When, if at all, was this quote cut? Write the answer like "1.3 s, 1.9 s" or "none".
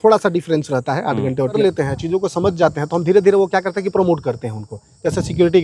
1.6 s